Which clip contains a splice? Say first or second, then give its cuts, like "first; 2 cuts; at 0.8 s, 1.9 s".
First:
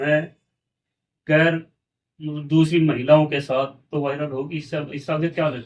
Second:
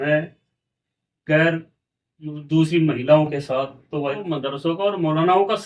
second; 1 cut; at 4.2 s